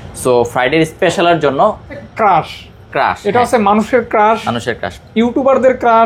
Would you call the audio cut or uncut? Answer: cut